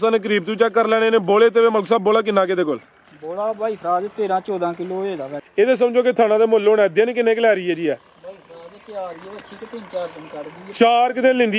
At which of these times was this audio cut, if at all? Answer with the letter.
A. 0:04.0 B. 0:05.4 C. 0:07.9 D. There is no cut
B